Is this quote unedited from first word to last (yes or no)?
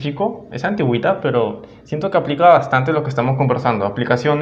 yes